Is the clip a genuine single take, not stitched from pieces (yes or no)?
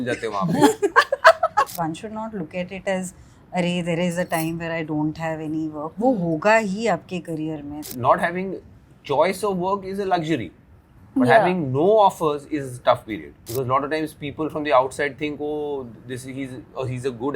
no